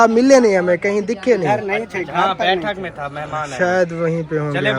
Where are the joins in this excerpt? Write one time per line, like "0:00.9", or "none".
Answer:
none